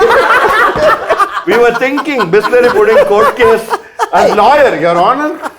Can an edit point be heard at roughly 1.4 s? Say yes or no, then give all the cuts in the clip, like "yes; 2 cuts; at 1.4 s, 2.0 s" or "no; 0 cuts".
yes; 1 cut; at 1.4 s